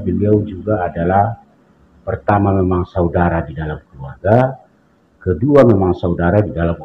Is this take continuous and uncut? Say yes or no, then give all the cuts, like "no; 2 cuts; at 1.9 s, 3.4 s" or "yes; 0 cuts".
yes; 0 cuts